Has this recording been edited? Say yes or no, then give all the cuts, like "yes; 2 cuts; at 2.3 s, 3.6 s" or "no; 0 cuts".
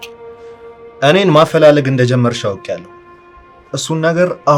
no; 0 cuts